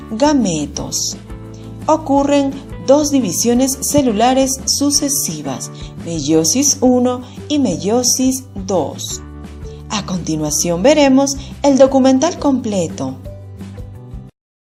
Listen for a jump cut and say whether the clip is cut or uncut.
uncut